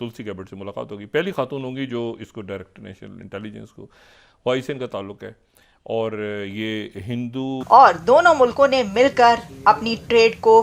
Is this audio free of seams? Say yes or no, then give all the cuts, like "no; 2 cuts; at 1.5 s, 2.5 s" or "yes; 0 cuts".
no; 1 cut; at 7.6 s